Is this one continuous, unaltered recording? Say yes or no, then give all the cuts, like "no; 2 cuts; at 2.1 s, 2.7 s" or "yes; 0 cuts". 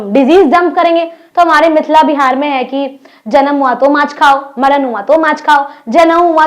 no; 1 cut; at 1.2 s